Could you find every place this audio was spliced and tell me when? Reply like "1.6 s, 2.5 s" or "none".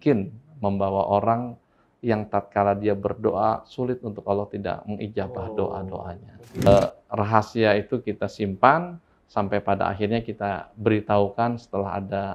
6.7 s